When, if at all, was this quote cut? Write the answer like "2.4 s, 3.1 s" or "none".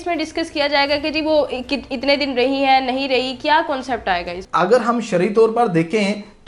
4.4 s